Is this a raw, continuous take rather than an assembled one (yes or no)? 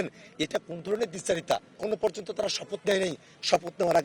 no